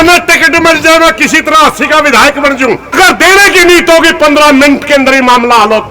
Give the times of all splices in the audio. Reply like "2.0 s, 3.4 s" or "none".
2.9 s